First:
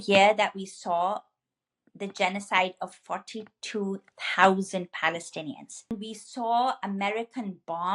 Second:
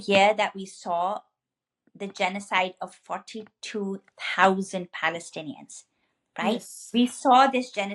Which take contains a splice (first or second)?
first